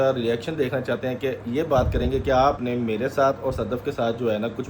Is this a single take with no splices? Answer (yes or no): yes